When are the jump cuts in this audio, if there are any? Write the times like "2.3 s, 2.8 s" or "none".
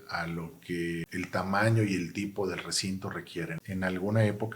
1.1 s, 3.5 s